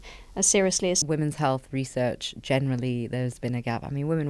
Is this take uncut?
no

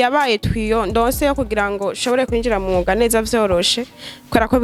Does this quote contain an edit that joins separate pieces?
no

